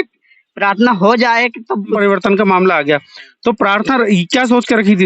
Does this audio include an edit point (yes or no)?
yes